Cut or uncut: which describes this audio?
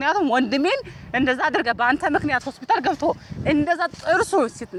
uncut